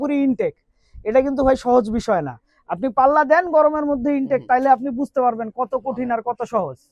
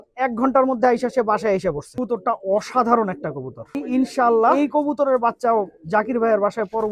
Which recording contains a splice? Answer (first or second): second